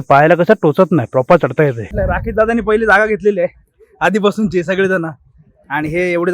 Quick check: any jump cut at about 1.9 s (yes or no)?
yes